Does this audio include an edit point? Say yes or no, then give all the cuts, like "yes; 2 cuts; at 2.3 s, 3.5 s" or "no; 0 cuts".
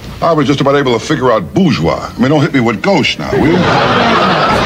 no; 0 cuts